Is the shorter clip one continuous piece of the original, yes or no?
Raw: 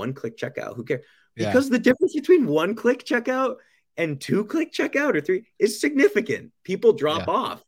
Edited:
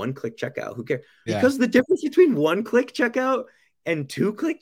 no